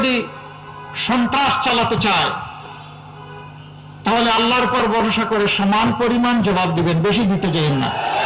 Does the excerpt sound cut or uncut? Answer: uncut